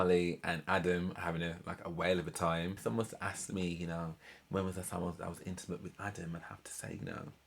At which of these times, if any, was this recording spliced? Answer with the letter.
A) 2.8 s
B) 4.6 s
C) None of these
A